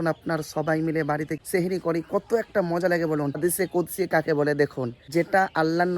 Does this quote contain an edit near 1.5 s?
no; 1 cut; at 3.4 s

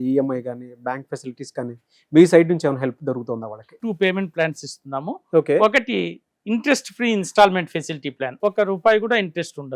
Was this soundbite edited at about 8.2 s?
yes; 2 cuts; at 3.7 s, 8.2 s

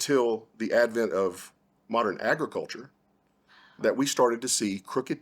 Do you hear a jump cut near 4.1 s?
no; 1 cut; at 2.2 s

